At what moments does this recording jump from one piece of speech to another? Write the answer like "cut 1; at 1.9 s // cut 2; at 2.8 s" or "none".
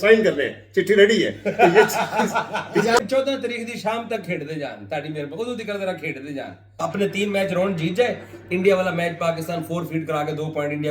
cut 1; at 3.0 s // cut 2; at 6.7 s